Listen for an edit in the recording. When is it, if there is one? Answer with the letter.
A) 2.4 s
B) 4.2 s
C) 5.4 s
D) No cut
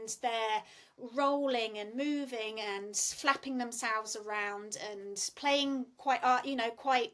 D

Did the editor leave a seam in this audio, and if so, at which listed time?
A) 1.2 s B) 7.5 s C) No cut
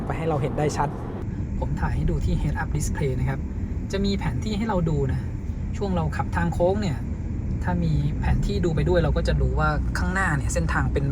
A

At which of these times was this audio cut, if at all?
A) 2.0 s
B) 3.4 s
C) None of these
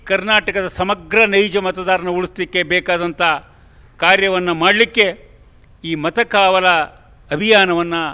C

